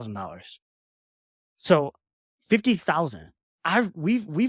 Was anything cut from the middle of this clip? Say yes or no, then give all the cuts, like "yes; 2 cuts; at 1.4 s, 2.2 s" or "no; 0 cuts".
no; 0 cuts